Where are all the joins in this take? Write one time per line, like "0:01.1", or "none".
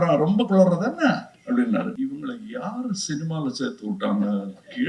0:01.9